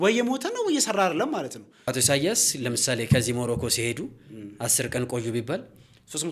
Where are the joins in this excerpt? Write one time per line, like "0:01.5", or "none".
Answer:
0:01.9